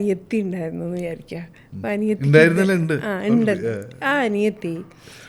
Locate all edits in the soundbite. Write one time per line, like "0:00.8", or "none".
none